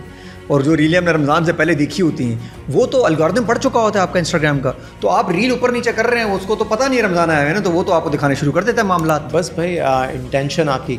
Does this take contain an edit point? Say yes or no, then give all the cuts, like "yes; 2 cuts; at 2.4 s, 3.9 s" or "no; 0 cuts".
no; 0 cuts